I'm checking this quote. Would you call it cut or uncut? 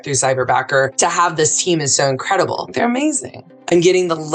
cut